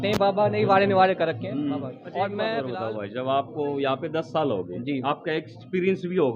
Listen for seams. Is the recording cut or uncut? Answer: cut